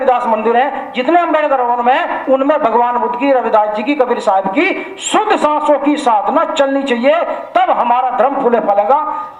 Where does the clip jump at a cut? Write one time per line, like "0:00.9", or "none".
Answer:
none

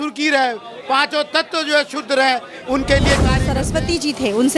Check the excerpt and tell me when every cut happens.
0:03.5

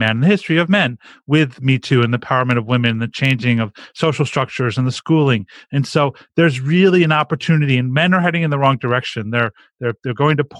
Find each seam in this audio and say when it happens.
none

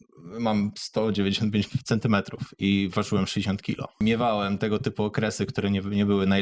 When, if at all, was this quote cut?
0:03.9

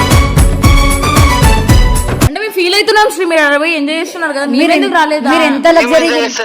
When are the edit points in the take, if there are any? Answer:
0:02.3

